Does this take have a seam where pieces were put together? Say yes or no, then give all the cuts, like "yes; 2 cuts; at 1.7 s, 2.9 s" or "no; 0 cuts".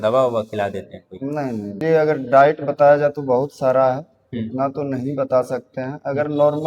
yes; 1 cut; at 1.7 s